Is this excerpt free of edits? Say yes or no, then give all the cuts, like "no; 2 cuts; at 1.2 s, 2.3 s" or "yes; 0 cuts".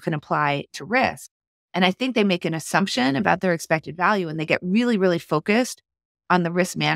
yes; 0 cuts